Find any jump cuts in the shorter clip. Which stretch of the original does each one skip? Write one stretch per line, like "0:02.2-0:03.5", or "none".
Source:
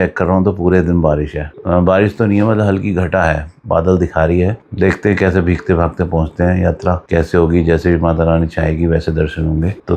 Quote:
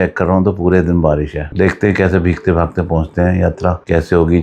0:01.4-0:04.6